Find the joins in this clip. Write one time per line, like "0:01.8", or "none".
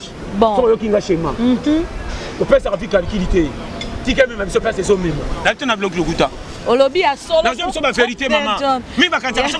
none

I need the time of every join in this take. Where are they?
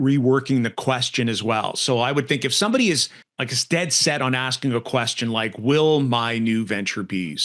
none

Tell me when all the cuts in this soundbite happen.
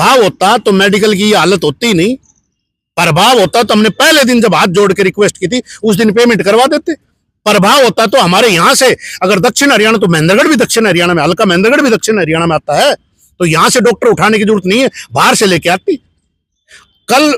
none

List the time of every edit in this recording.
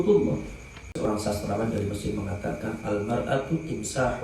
0:01.0

